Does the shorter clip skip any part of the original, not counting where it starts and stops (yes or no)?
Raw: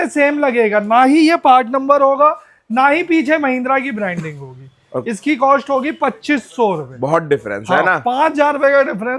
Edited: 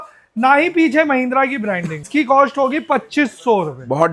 yes